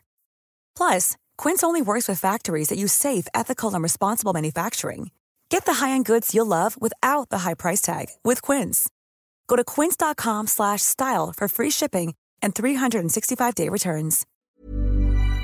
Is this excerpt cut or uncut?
cut